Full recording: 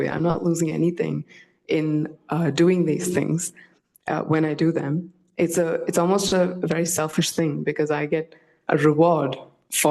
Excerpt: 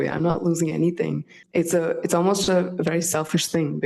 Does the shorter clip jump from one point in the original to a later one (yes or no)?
yes